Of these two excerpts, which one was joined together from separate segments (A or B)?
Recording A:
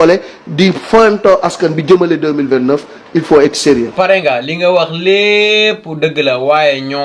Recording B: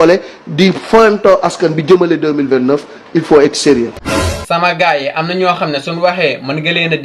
B